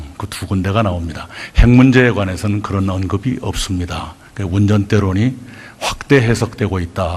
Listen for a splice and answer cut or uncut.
cut